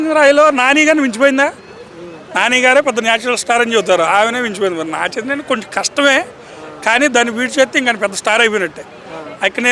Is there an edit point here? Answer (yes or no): no